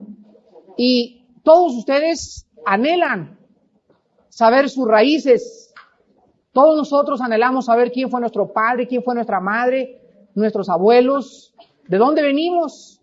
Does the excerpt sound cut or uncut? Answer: uncut